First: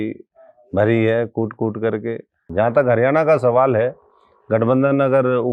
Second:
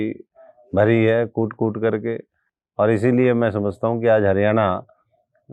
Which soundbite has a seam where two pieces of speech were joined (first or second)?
first